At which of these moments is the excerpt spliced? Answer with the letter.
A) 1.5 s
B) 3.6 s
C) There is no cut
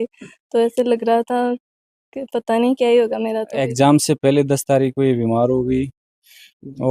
B